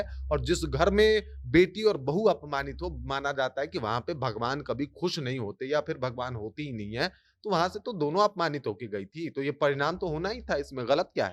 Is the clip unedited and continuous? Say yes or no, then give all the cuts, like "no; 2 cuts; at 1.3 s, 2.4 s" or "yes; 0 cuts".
yes; 0 cuts